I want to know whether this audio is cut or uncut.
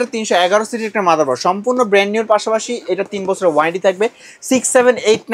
uncut